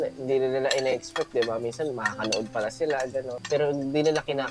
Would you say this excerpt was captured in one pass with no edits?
no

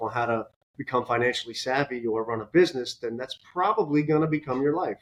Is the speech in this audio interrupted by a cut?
no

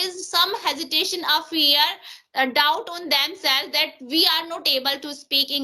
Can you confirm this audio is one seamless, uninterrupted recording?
yes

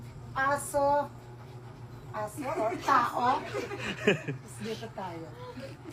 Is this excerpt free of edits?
yes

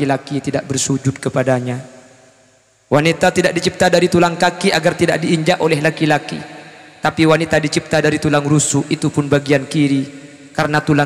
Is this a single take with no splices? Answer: yes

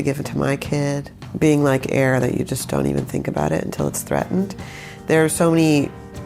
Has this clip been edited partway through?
yes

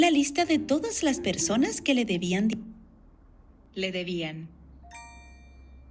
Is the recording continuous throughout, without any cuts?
yes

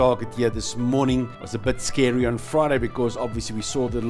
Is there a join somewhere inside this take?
yes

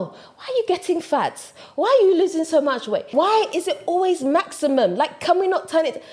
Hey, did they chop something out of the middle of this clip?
yes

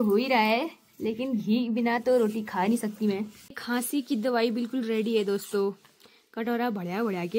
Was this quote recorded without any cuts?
no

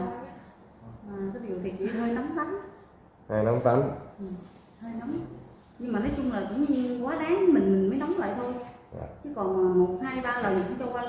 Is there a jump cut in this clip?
no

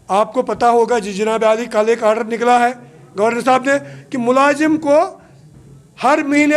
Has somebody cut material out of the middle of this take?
no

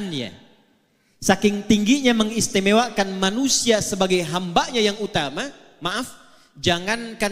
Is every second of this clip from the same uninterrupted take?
yes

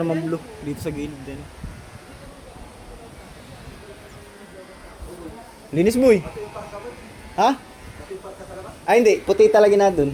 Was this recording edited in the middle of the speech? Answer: no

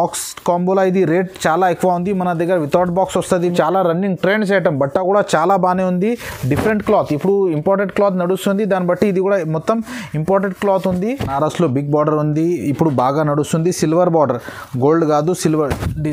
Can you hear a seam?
yes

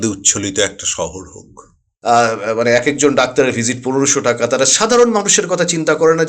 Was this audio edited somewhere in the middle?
yes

